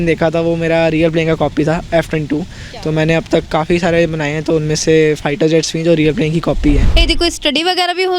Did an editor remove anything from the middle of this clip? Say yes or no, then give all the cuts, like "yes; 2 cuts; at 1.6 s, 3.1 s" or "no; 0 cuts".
yes; 1 cut; at 6.9 s